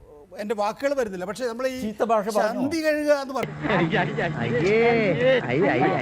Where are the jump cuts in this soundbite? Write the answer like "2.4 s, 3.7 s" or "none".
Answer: none